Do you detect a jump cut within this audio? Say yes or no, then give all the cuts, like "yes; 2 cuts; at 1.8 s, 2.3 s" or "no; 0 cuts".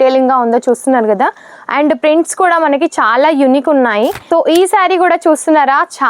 yes; 1 cut; at 4.2 s